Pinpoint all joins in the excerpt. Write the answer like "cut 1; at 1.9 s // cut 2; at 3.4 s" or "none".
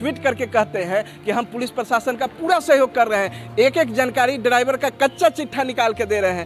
none